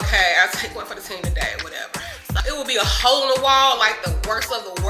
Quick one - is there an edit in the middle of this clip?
yes; 1 cut; at 2.4 s

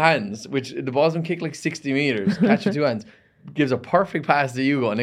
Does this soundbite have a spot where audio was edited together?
no; 0 cuts

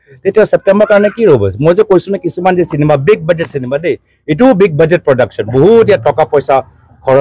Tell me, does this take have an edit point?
no; 0 cuts

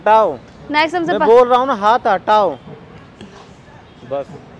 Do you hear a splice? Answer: no; 0 cuts

